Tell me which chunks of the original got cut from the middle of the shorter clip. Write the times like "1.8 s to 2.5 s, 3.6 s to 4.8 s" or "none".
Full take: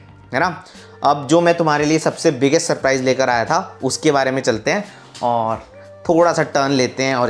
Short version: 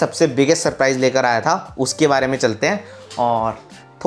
none